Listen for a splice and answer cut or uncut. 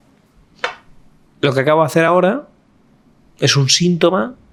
uncut